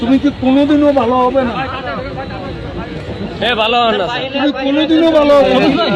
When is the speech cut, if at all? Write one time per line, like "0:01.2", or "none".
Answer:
none